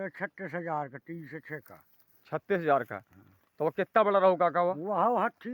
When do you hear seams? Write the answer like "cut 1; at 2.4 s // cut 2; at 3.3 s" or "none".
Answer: none